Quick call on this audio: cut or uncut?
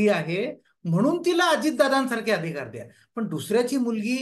uncut